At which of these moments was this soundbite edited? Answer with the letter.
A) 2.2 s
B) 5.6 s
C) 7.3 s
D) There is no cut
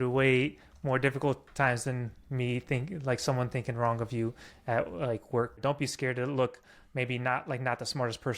B